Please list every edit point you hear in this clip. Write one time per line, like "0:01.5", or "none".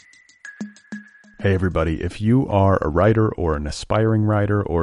0:00.9